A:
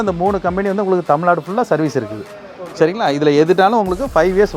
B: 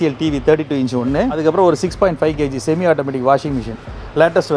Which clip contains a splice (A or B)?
B